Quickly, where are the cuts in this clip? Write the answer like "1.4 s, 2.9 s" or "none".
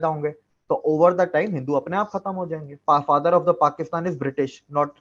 2.8 s

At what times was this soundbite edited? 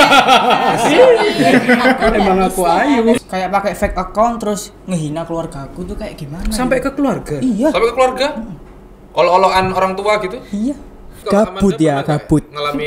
3.2 s, 11.2 s

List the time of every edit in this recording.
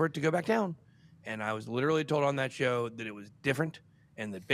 none

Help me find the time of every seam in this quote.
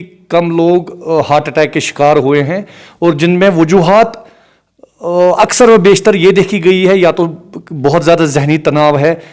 none

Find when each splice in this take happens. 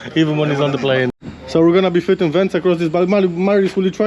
1.2 s

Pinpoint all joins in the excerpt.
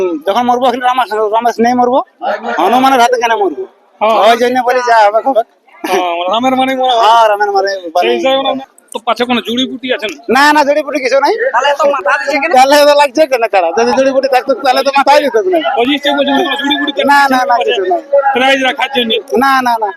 8.6 s

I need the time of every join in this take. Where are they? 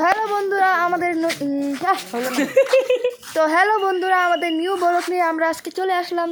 none

